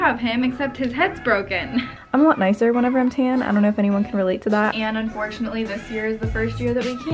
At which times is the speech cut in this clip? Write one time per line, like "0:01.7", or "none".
0:02.0
0:04.7